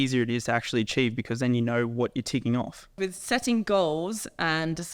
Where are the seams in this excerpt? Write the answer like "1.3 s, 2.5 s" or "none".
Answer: 3.0 s